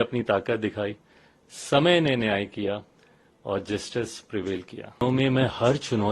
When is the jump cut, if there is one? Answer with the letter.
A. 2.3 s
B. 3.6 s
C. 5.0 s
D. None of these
C